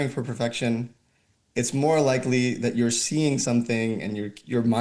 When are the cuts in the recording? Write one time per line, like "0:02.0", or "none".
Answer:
none